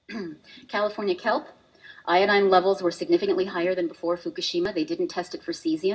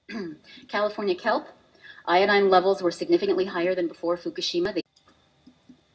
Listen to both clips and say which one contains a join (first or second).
first